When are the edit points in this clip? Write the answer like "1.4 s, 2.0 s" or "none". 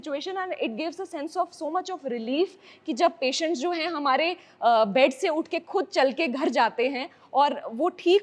none